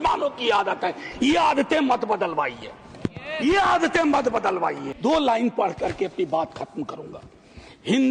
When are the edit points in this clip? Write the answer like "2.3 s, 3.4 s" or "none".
4.9 s